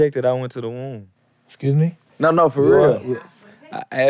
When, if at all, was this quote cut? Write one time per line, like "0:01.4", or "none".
0:02.0

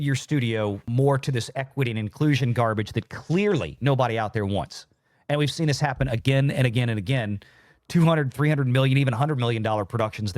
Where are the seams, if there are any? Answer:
0:00.9
0:03.8

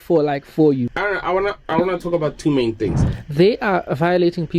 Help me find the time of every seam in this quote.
0:00.8
0:03.1

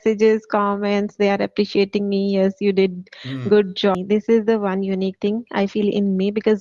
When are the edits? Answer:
0:04.0

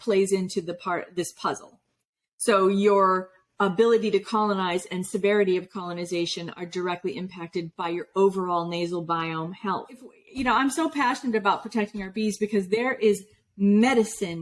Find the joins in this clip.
0:10.2

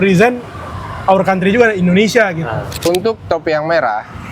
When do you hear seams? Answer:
0:02.7

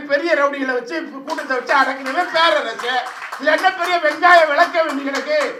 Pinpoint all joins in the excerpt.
none

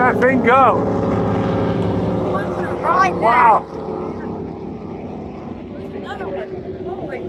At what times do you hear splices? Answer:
none

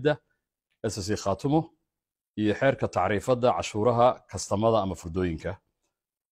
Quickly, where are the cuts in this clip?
none

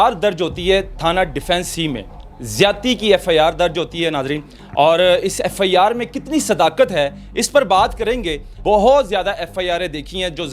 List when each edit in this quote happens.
0:08.5

